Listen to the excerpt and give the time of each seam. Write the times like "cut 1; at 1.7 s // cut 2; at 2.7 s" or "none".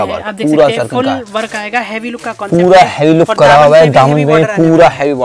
none